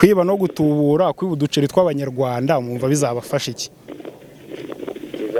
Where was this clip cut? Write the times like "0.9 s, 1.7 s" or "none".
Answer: none